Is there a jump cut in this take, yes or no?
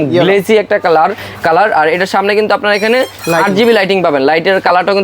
no